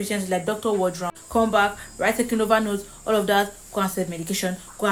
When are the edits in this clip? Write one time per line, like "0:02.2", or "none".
none